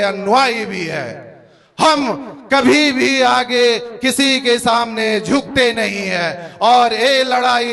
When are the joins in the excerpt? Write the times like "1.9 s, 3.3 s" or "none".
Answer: none